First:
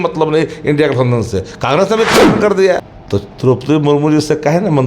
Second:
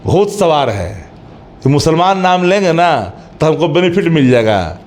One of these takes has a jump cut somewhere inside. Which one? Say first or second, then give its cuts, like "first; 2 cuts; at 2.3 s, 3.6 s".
first; 1 cut; at 2.9 s